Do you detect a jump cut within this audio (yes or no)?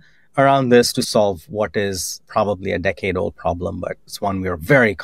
yes